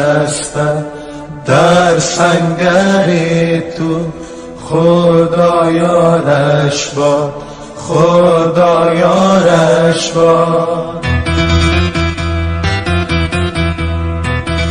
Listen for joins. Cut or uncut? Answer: cut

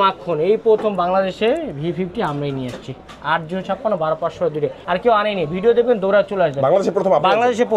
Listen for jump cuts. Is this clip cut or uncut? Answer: cut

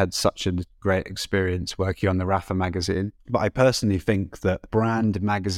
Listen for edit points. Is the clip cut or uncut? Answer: cut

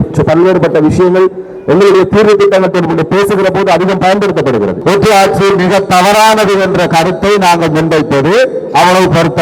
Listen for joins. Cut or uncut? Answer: cut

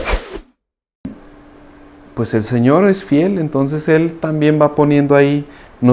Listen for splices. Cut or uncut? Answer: cut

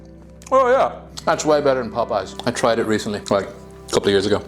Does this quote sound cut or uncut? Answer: cut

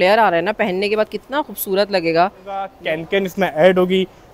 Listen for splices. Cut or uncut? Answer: cut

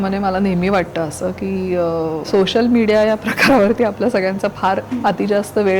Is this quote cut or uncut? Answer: cut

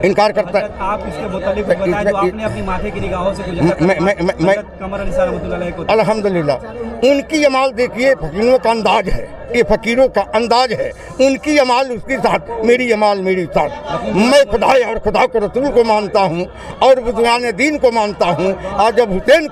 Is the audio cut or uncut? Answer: uncut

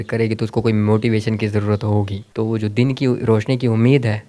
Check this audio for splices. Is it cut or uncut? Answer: cut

